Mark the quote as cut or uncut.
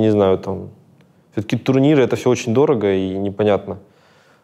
uncut